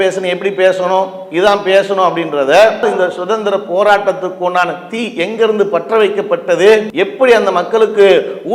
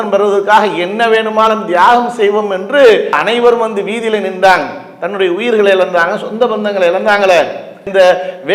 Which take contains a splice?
first; 2 cuts; at 2.8 s, 6.9 s

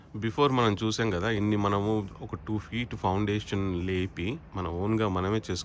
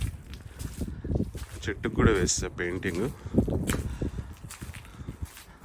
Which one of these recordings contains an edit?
first; 1 cut; at 1.4 s

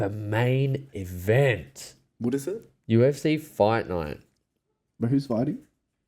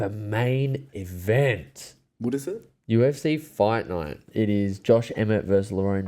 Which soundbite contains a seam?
second; 1 cut; at 4.3 s

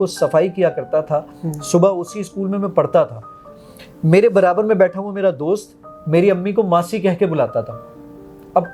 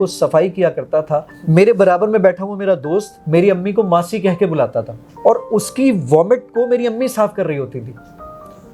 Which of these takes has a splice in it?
second; 3 cuts; at 1.3 s, 3.2 s, 5.0 s

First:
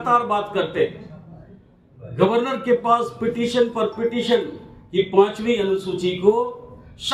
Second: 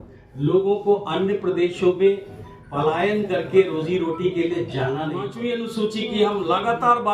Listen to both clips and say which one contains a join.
second; 1 cut; at 5.3 s

